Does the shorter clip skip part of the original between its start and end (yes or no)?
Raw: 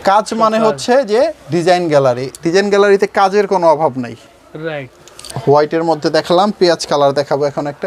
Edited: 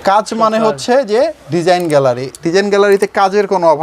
no